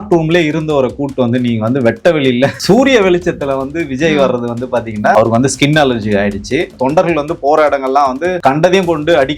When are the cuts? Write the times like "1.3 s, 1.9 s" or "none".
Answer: 2.6 s, 5.1 s, 6.7 s, 8.4 s